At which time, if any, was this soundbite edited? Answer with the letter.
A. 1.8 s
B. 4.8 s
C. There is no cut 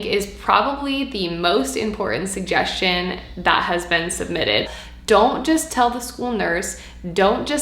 B